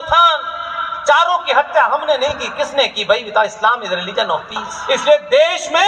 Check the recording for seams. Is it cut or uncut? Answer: cut